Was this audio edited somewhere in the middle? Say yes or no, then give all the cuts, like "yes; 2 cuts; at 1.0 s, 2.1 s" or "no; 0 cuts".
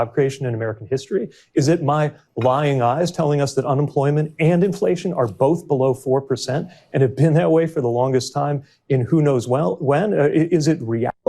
no; 0 cuts